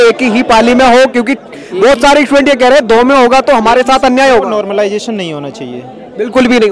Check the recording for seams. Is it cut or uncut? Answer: uncut